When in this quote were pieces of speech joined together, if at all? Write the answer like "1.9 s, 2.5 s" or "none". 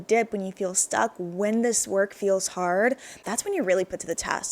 3.2 s